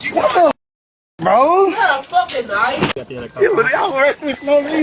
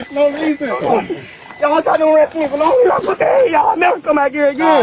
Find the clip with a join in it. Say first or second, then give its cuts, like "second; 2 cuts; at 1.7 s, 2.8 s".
first; 1 cut; at 3.1 s